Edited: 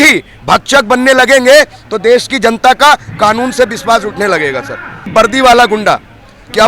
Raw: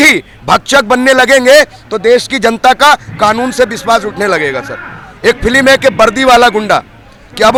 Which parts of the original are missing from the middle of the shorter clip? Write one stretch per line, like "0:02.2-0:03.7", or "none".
0:05.1-0:05.9